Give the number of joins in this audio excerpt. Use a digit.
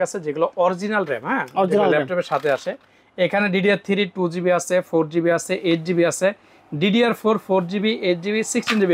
0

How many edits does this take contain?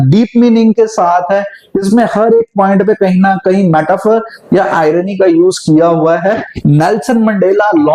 1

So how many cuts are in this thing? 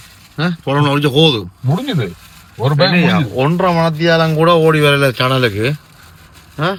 0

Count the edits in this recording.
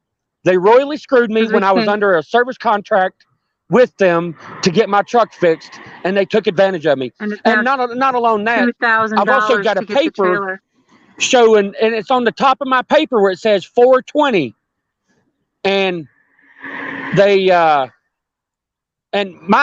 0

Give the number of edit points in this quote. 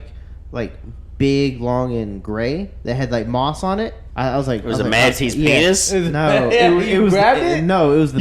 1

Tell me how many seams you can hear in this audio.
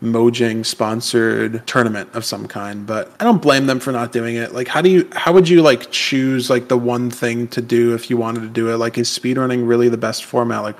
0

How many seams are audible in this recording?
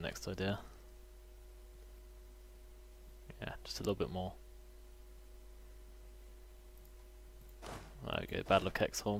0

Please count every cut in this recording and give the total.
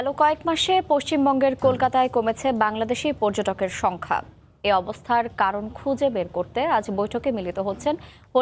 0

